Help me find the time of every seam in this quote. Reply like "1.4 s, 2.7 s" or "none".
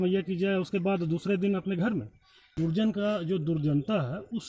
2.5 s